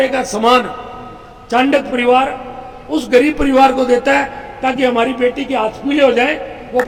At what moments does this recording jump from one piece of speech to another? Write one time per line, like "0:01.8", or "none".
none